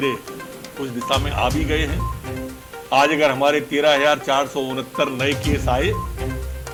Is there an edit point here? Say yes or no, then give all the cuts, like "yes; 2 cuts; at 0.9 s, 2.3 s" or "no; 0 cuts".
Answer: no; 0 cuts